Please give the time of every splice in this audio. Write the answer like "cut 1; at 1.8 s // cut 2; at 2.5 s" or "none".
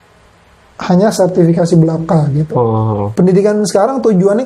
cut 1; at 3.1 s